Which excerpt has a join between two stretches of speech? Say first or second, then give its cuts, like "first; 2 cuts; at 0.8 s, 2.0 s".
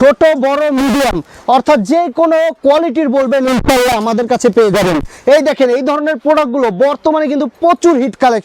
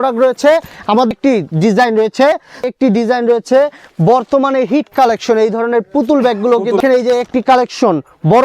second; 3 cuts; at 1.1 s, 2.7 s, 6.8 s